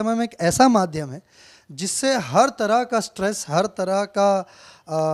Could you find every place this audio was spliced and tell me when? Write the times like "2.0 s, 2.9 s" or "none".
none